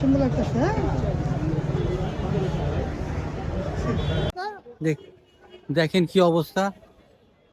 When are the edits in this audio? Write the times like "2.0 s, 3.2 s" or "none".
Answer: 4.3 s